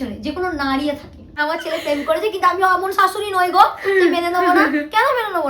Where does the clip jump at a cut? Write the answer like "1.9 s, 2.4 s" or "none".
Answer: 1.3 s

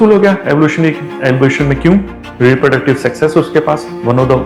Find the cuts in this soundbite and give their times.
none

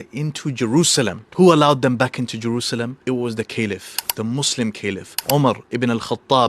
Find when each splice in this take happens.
1.2 s

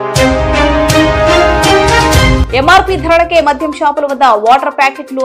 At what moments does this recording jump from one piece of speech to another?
2.4 s

